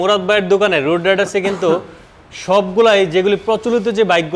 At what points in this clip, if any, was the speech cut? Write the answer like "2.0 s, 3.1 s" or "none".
none